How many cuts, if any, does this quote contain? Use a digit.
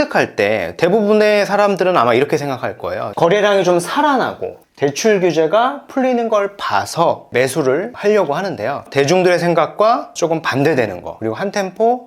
2